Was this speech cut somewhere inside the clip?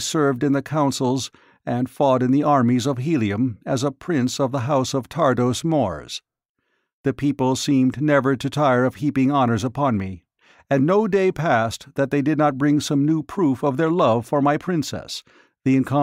yes; 1 cut; at 11.6 s

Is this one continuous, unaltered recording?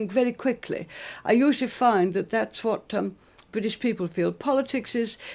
yes; 0 cuts

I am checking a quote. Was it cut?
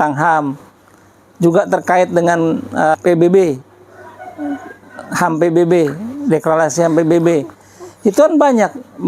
yes; 1 cut; at 2.9 s

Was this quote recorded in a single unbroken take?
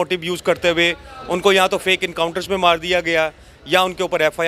yes; 0 cuts

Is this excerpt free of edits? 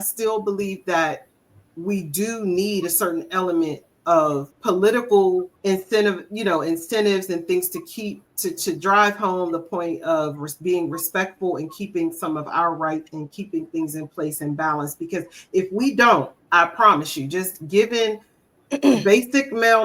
no; 4 cuts; at 4.5 s, 5.5 s, 8.2 s, 16.4 s

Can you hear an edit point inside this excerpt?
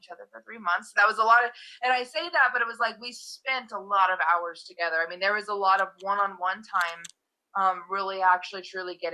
no; 0 cuts

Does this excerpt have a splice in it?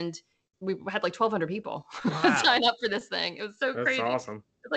no; 0 cuts

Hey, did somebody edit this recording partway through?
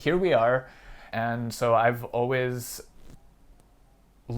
yes; 1 cut; at 1.0 s

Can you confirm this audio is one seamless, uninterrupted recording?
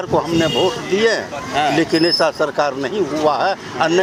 yes; 0 cuts

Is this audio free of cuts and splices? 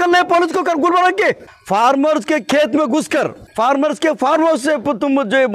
no; 2 cuts; at 1.5 s, 3.4 s

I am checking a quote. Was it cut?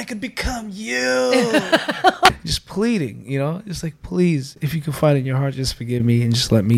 yes; 1 cut; at 2.4 s

